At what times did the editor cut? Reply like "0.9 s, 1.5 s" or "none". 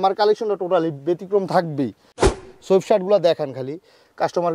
2.4 s